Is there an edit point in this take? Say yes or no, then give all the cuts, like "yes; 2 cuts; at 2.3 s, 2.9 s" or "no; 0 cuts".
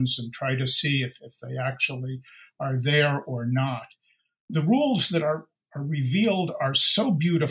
yes; 1 cut; at 4.5 s